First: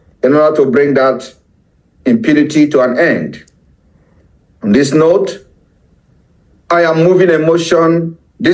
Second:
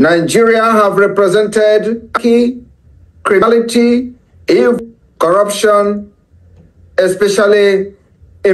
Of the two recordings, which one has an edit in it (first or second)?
second